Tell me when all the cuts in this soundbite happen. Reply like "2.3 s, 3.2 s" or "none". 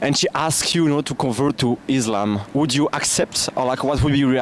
none